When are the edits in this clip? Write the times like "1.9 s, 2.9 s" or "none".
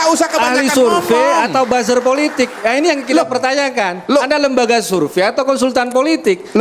none